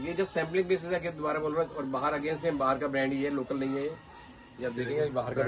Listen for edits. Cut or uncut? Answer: uncut